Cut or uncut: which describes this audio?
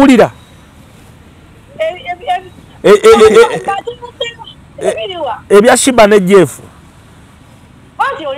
uncut